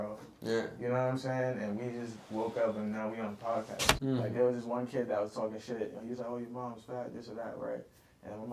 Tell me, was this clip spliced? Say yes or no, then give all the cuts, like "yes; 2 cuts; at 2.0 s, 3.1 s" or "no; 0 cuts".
yes; 1 cut; at 3.9 s